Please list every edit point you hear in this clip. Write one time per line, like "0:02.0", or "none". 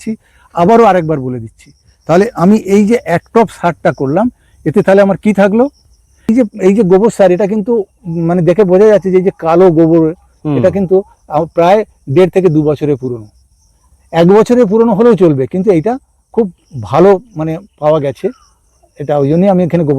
0:06.3